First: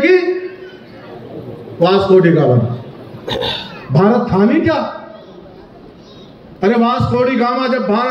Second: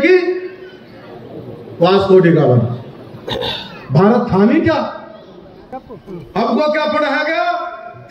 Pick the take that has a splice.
second; 1 cut; at 5.9 s

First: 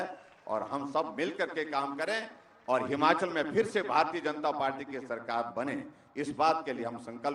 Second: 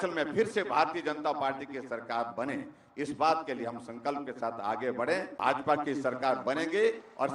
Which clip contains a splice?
second; 1 cut; at 5.3 s

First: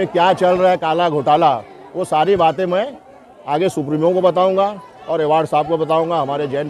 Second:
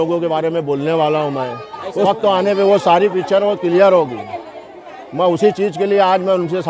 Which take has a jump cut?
second; 1 cut; at 2.1 s

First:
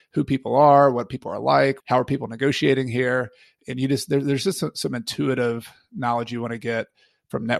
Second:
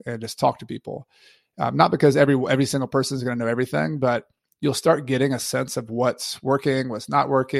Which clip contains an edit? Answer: first; 1 cut; at 1.8 s

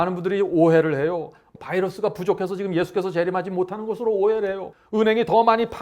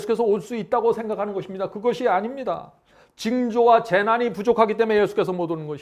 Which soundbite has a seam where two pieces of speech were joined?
first; 2 cuts; at 1.4 s, 4.7 s

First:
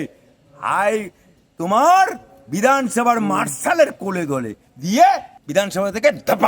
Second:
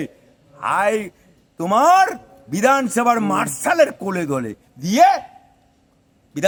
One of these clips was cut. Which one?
first; 1 cut; at 5.3 s

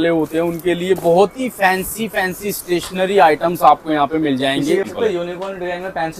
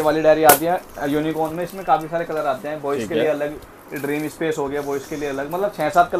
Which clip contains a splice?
first; 1 cut; at 4.8 s

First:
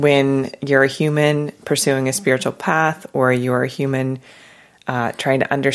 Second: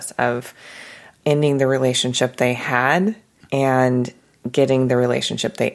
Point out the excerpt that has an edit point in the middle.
second; 2 cuts; at 1.2 s, 3.3 s

